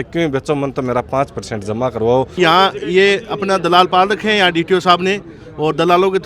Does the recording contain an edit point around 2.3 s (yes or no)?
yes